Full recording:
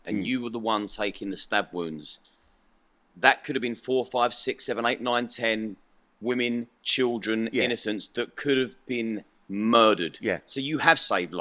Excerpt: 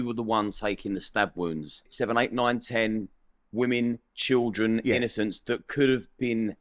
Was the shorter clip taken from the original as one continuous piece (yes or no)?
no